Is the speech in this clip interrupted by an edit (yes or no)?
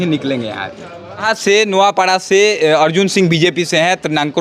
yes